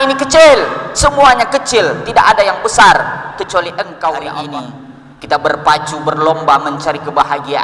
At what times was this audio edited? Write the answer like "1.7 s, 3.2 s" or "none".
4.5 s